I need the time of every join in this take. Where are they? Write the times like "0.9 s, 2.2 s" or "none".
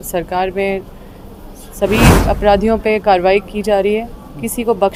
none